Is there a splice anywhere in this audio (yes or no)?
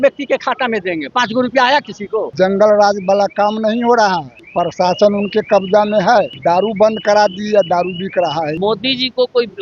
yes